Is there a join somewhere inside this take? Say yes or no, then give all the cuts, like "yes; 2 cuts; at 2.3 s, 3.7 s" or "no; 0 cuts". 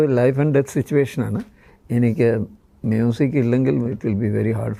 no; 0 cuts